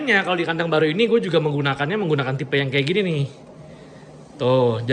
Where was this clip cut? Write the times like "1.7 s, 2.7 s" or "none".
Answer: none